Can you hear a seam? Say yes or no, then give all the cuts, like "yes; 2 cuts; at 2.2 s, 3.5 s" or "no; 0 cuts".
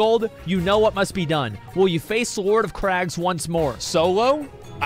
yes; 1 cut; at 3.8 s